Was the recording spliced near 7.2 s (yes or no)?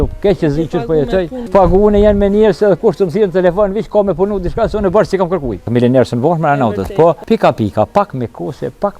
yes